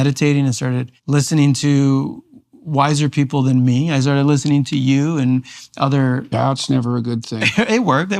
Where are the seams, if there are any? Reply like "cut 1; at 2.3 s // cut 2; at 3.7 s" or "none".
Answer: cut 1; at 0.9 s